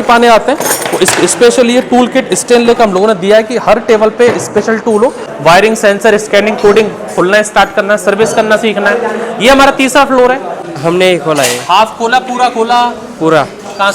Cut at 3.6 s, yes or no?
no